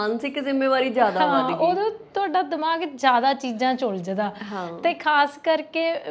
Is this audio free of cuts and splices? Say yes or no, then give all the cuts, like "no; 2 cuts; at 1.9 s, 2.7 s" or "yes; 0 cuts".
yes; 0 cuts